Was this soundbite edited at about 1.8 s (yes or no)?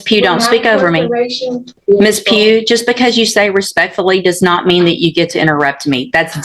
yes